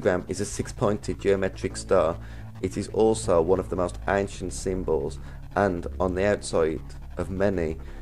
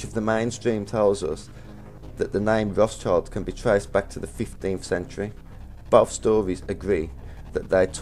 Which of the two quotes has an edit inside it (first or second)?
second